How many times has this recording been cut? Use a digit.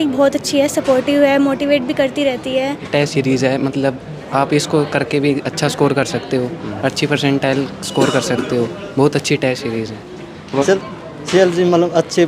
2